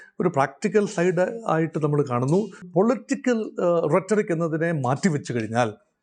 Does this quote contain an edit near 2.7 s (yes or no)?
yes